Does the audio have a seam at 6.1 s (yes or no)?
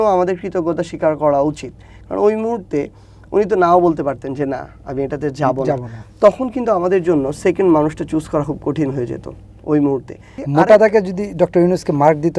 no